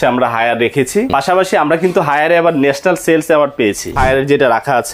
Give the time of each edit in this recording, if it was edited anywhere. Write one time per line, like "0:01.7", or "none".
0:01.1
0:04.0